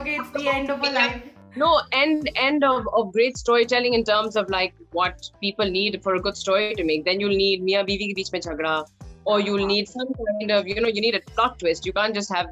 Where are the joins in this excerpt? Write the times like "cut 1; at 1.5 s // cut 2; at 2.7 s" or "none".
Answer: cut 1; at 1.3 s